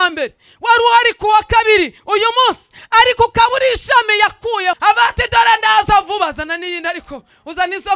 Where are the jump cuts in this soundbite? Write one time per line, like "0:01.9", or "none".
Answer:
0:04.8

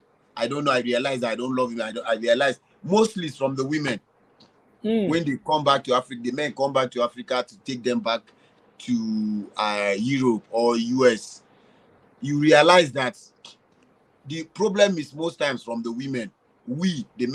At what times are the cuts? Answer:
none

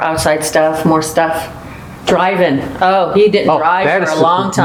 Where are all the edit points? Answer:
none

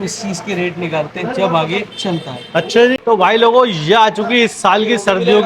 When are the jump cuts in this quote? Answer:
0:03.0

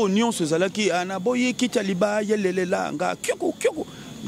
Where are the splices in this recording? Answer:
none

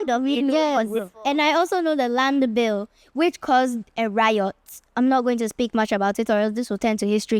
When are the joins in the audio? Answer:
none

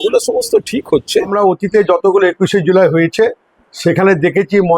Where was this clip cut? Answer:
0:01.3

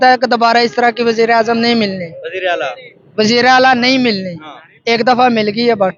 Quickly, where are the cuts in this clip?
none

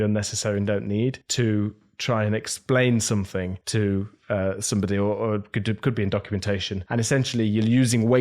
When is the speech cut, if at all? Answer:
0:01.2
0:03.6
0:06.8

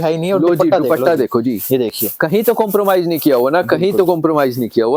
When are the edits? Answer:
none

